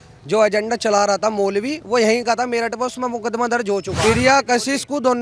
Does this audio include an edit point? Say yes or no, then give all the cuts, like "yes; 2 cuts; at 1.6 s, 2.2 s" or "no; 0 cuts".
yes; 1 cut; at 3.9 s